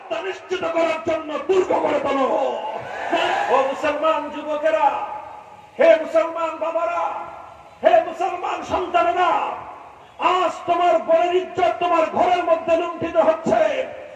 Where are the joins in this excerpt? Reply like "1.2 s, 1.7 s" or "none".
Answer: 3.4 s